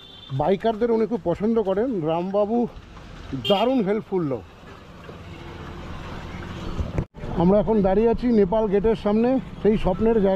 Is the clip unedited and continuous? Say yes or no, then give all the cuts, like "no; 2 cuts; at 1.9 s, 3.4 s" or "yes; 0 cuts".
no; 1 cut; at 7.1 s